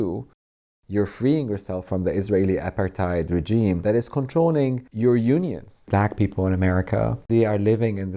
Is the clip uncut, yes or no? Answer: no